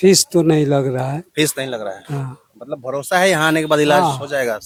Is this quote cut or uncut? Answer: uncut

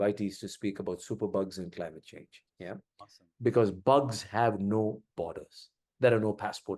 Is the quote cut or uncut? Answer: cut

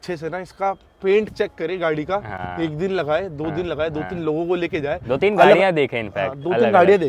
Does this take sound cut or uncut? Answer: uncut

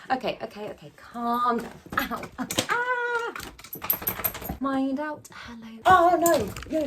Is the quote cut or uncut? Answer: uncut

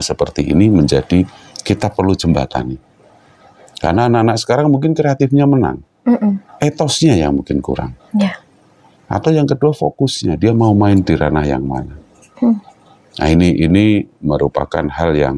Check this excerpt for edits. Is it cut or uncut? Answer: uncut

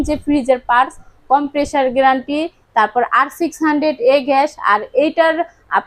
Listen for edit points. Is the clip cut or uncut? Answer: uncut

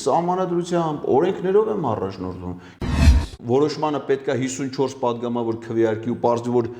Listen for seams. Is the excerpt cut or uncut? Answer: cut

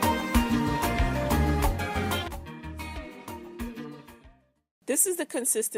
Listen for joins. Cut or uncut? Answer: uncut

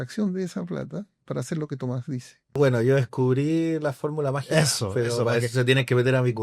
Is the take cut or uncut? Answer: cut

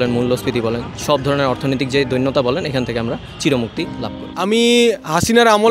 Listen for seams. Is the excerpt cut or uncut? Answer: cut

